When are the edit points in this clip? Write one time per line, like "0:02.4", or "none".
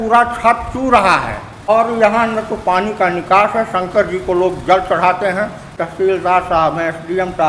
0:01.7
0:05.7